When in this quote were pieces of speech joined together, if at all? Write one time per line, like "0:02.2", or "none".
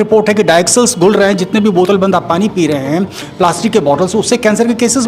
none